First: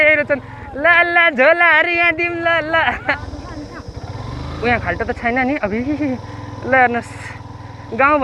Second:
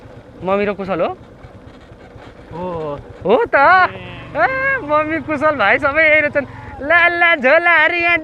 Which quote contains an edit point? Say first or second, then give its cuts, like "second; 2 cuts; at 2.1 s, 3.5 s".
first; 1 cut; at 3.2 s